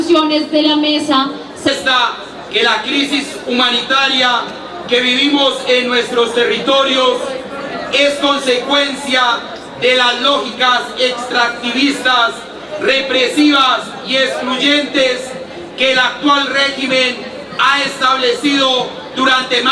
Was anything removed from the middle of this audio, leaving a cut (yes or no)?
no